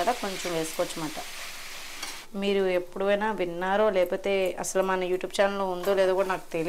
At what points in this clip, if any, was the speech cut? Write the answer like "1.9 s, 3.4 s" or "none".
2.1 s